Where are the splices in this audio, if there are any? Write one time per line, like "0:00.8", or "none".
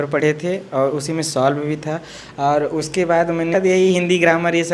0:03.5